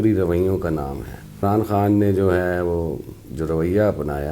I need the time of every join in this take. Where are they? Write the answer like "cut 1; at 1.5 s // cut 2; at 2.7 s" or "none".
cut 1; at 1.4 s